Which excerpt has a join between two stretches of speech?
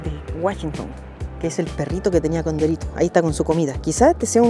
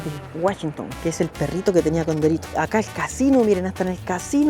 second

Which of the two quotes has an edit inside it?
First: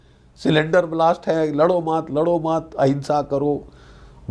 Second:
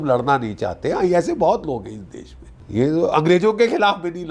second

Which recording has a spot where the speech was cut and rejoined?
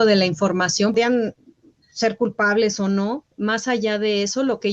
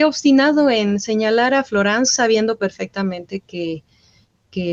first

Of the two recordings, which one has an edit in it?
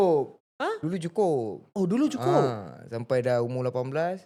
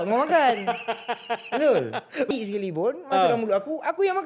second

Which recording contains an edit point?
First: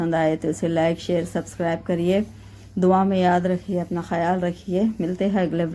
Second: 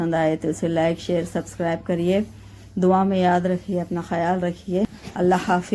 second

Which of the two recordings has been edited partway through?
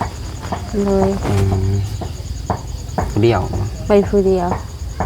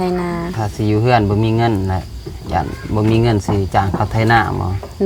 first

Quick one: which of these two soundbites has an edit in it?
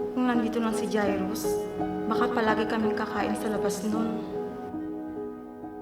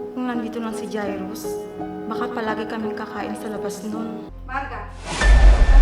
second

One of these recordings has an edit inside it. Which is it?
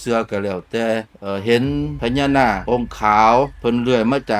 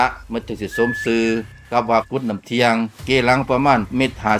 first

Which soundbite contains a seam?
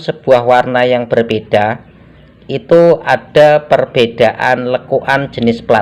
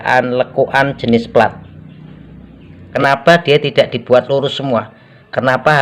second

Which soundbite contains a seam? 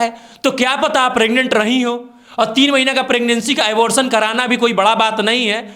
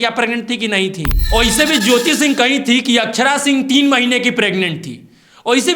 second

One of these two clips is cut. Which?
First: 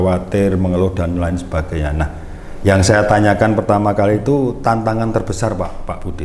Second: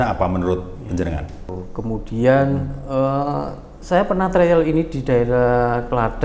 second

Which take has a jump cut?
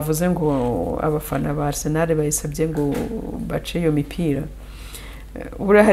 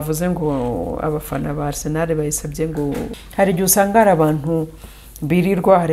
second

